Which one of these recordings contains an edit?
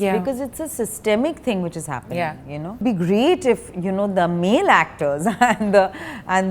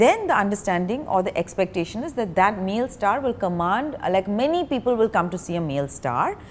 first; 1 cut; at 2.8 s

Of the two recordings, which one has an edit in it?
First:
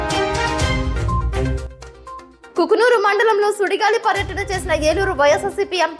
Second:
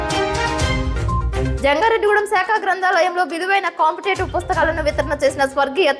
first; 1 cut; at 1.5 s

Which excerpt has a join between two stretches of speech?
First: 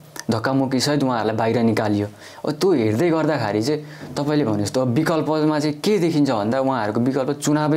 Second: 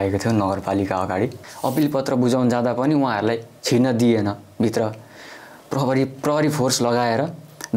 second; 1 cut; at 1.5 s

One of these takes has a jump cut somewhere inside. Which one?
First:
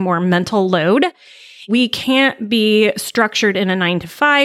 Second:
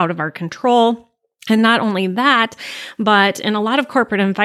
first; 1 cut; at 1.7 s

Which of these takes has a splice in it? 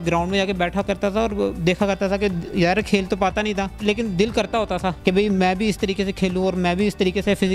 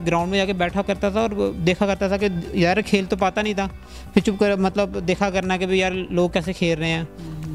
first; 2 cuts; at 3.8 s, 5.0 s

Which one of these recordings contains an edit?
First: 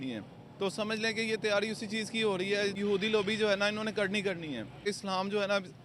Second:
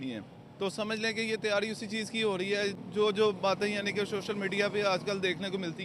first; 2 cuts; at 2.8 s, 4.9 s

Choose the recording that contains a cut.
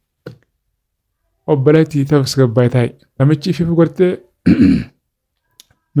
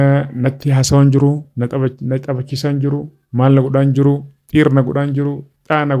first; 1 cut; at 3.0 s

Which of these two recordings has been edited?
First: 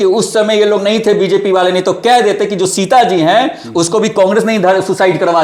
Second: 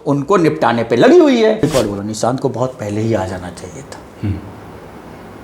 second; 1 cut; at 1.6 s

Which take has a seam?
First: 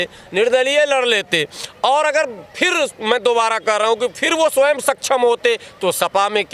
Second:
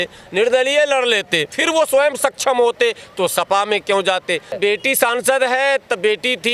second; 2 cuts; at 1.6 s, 4.6 s

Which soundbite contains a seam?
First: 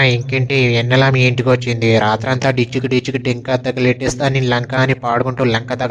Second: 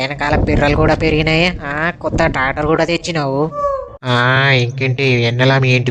second; 1 cut; at 3.6 s

